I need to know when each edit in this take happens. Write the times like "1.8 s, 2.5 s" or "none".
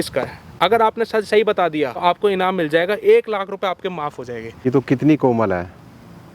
2.0 s, 4.6 s